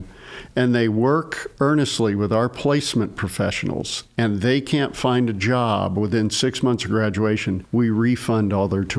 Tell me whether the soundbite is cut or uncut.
cut